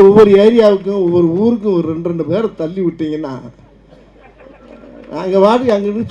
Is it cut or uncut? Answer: uncut